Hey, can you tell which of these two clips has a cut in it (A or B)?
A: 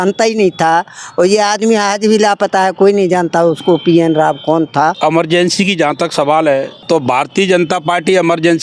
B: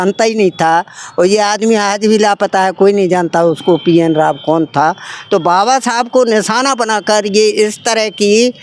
A